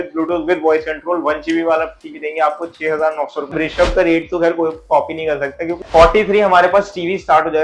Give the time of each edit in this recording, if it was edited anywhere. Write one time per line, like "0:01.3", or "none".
0:03.5
0:05.7